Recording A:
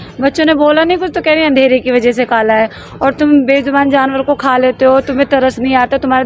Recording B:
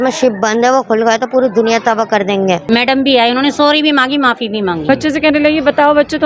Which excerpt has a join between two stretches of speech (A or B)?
B